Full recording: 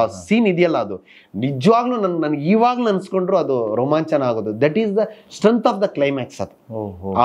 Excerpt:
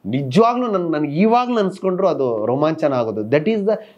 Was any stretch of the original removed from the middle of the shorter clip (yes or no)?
no